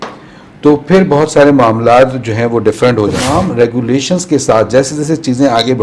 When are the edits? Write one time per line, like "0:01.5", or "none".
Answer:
0:03.2